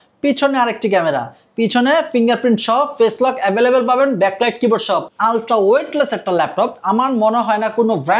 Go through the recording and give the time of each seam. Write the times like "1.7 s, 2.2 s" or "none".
5.1 s